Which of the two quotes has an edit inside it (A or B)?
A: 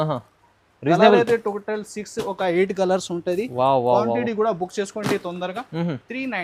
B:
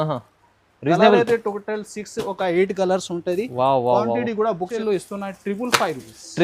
B